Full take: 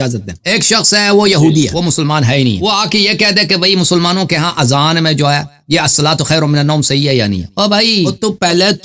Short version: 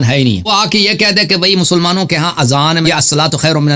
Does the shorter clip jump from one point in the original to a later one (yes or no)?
yes